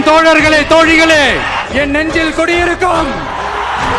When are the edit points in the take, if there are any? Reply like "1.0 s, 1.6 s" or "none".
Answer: none